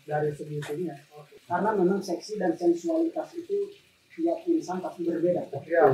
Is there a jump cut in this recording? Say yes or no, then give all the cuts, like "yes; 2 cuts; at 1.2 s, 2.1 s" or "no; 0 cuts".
yes; 1 cut; at 1.3 s